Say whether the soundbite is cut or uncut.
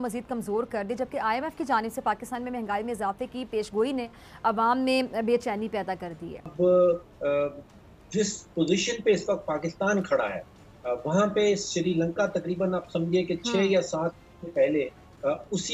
cut